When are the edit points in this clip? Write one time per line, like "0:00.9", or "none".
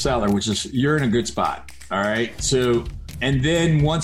0:03.0